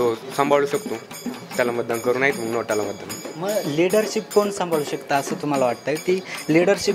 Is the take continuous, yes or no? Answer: yes